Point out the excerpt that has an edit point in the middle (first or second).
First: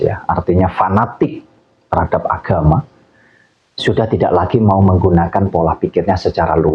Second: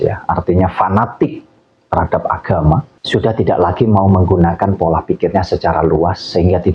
second